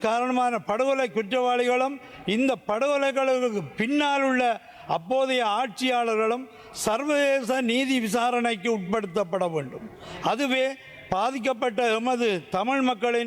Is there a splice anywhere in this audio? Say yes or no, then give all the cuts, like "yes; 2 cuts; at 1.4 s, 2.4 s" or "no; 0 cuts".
no; 0 cuts